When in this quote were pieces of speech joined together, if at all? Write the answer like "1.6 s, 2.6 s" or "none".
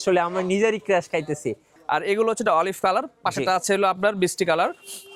1.7 s